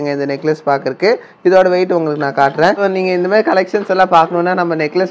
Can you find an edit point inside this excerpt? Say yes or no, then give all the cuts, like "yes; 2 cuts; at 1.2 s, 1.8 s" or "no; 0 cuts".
yes; 1 cut; at 3.0 s